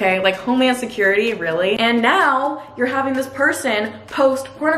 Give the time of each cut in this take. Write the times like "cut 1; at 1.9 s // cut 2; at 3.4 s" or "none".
cut 1; at 1.8 s